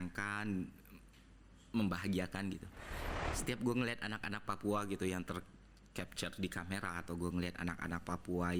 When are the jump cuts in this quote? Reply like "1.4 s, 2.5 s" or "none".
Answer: none

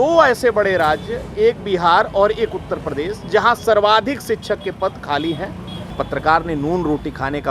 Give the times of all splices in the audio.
5.9 s

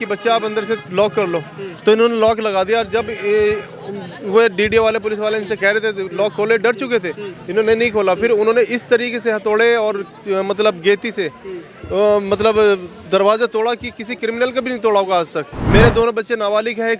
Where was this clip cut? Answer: 15.5 s

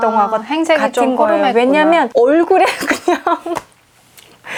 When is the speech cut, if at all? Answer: none

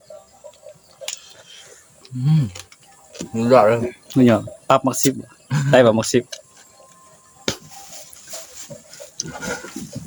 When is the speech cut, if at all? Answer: none

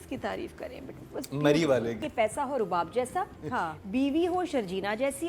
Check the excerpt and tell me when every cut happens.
2.0 s

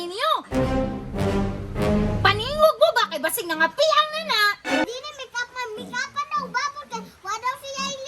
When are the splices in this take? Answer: 4.8 s

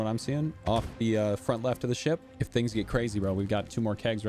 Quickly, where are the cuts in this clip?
2.4 s

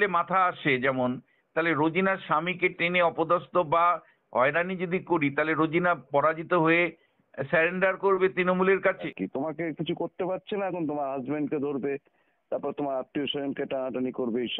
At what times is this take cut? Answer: 9.0 s

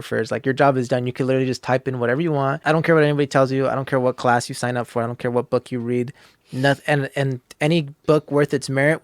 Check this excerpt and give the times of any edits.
2.6 s

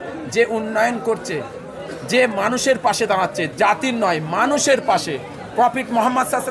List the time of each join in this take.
none

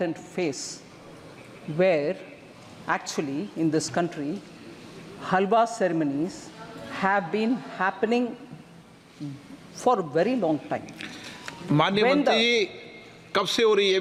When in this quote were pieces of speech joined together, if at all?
none

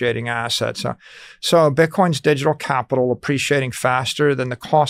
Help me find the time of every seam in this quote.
none

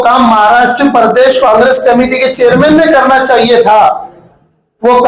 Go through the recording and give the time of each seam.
none

